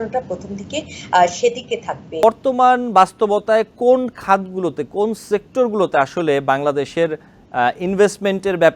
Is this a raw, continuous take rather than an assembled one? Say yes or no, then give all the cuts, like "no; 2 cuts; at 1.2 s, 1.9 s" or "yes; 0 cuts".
no; 1 cut; at 2.2 s